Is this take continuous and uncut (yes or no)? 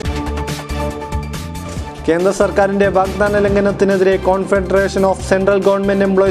no